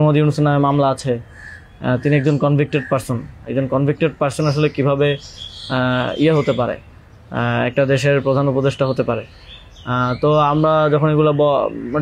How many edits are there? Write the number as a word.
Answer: zero